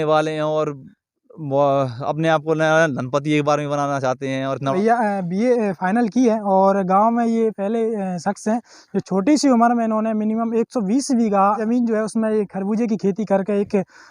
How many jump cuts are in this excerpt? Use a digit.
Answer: 2